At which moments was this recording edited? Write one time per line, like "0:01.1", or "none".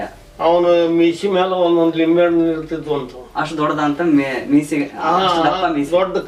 none